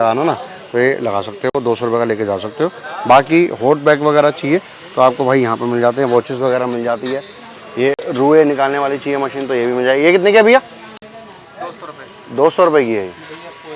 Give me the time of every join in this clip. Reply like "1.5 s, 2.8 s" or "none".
none